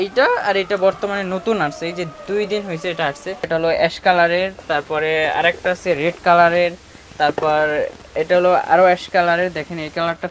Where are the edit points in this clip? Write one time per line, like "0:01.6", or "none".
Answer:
0:03.5